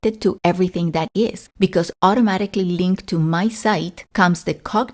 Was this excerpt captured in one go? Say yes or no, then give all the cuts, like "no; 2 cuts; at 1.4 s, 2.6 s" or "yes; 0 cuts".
no; 2 cuts; at 1.4 s, 4.0 s